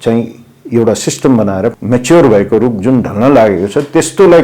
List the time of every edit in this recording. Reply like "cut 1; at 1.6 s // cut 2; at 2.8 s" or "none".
cut 1; at 1.7 s